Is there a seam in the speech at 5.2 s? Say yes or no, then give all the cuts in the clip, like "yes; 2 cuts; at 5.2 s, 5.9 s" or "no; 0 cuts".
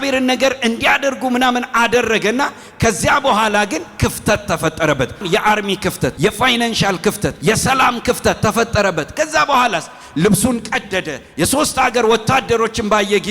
yes; 3 cuts; at 5.2 s, 6.1 s, 7.4 s